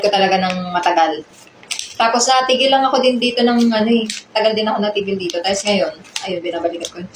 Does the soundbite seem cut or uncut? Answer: uncut